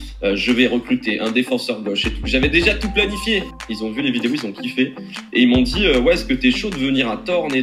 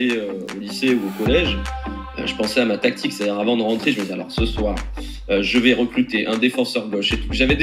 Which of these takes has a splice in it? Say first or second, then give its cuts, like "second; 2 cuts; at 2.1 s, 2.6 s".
first; 1 cut; at 3.5 s